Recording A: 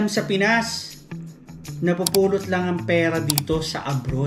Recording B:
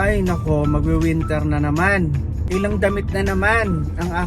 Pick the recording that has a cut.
B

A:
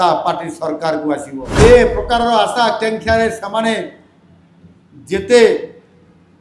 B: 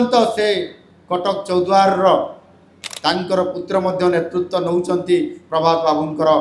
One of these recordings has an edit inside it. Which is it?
A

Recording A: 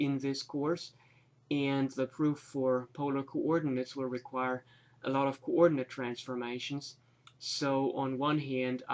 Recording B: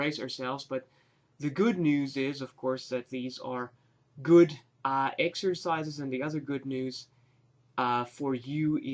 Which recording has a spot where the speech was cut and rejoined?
A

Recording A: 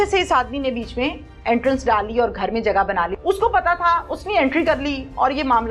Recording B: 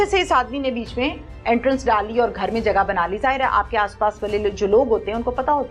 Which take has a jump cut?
A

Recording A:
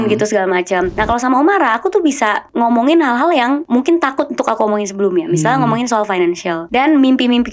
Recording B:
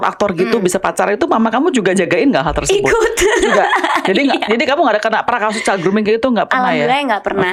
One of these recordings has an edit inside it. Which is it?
A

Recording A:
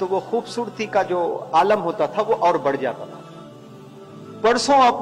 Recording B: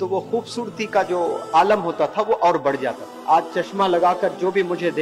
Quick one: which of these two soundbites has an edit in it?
B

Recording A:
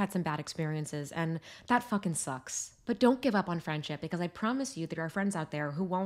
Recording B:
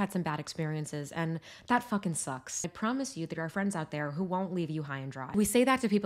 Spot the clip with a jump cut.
B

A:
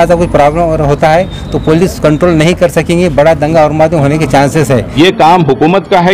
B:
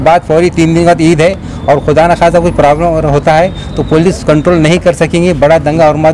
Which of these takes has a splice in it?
A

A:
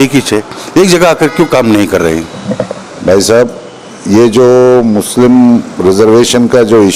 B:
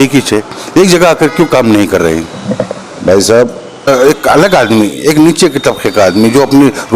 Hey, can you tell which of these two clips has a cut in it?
B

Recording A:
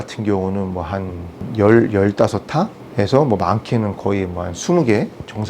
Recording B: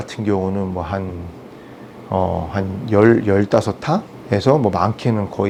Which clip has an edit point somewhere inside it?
A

